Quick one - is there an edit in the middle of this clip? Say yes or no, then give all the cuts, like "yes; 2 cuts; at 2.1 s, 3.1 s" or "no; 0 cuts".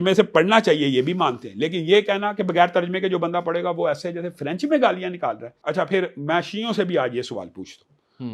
yes; 1 cut; at 5.5 s